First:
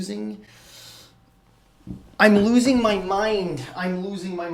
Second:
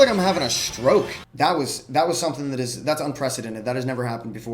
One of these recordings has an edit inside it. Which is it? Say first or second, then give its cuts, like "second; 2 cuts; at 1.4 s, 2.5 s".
second; 1 cut; at 1.2 s